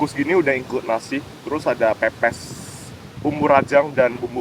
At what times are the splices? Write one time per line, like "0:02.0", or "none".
none